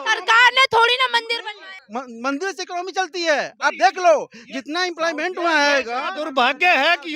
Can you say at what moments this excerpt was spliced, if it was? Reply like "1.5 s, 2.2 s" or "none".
none